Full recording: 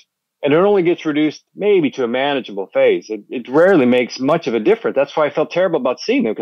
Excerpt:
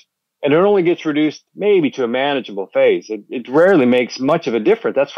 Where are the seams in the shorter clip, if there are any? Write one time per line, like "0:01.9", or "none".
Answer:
none

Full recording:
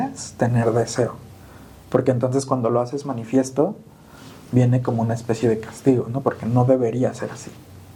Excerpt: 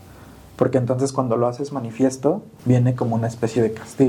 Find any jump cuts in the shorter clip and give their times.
0:02.5

